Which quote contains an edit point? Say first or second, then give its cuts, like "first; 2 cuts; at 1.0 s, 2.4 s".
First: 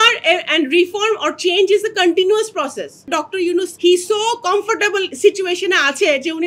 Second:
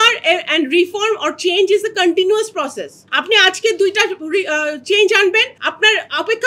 first; 1 cut; at 3.4 s